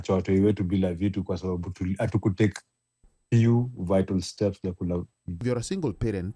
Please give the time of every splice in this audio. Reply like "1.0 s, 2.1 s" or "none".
5.4 s